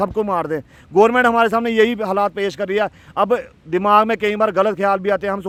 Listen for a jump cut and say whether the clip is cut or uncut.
uncut